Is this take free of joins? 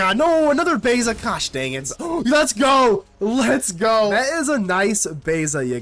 no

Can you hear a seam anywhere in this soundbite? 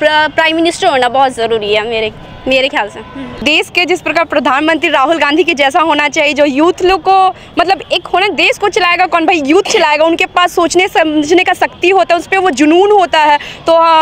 yes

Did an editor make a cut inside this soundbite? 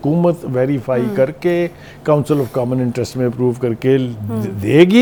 no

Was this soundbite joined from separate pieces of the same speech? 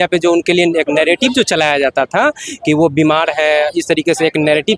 no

